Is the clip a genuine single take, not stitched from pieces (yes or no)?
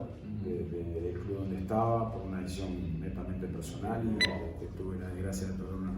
no